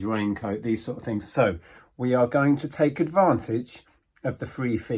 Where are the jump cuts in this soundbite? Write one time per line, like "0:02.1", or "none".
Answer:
none